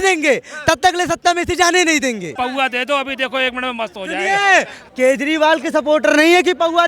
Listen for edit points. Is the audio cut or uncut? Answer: cut